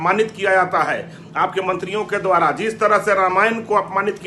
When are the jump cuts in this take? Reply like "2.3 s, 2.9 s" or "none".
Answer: none